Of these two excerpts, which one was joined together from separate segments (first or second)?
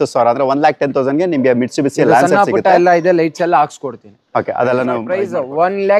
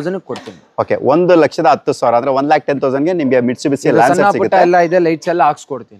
first